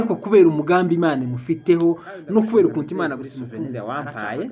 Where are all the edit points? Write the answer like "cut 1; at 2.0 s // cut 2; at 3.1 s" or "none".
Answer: cut 1; at 3.6 s